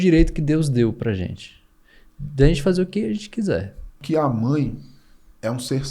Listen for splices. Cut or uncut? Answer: cut